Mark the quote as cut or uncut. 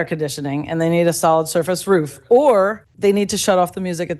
cut